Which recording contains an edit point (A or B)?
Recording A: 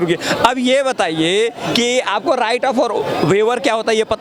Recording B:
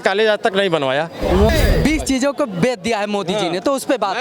B